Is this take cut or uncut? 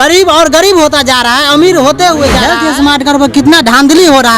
cut